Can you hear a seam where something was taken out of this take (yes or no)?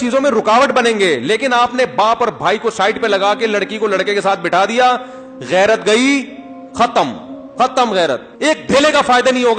yes